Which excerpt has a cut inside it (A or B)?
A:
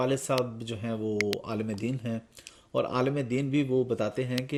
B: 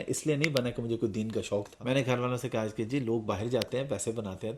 B